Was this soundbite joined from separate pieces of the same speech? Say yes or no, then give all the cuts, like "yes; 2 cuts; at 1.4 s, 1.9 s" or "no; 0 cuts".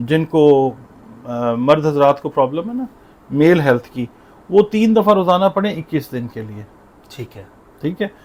no; 0 cuts